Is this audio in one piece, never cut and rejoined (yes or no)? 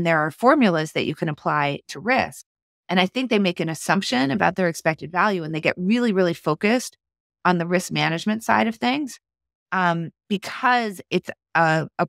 yes